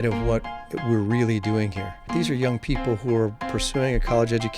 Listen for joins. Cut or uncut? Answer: cut